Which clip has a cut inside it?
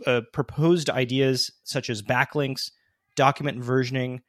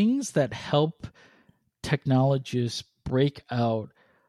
first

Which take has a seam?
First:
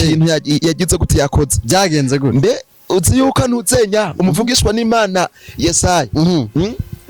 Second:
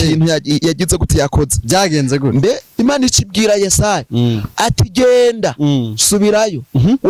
second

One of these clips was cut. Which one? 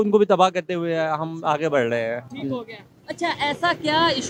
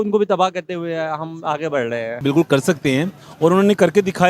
second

